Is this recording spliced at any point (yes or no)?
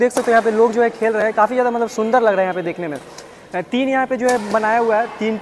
no